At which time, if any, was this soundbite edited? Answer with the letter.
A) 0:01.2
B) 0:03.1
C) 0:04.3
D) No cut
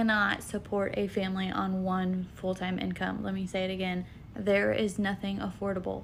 D